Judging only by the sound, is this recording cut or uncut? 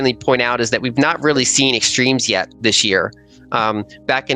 uncut